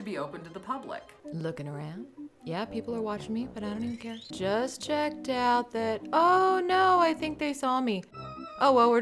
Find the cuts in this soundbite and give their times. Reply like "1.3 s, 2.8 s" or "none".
1.1 s, 4.3 s